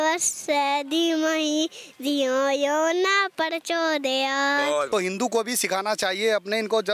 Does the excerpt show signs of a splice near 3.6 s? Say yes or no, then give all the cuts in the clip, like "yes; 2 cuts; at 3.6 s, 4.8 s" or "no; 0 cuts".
no; 1 cut; at 4.9 s